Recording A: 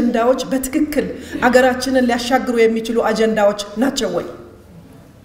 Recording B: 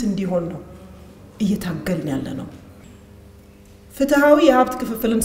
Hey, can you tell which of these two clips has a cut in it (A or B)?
B